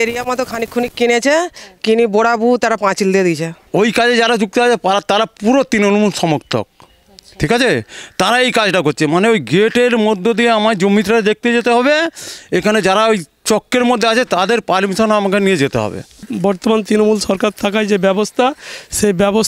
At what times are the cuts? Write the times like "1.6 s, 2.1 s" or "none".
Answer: 3.6 s, 16.3 s